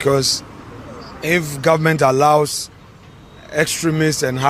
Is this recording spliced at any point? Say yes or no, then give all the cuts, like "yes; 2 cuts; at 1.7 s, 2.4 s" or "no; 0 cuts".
no; 0 cuts